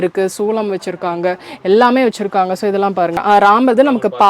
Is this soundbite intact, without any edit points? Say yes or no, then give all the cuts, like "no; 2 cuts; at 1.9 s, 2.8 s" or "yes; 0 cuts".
no; 1 cut; at 3.2 s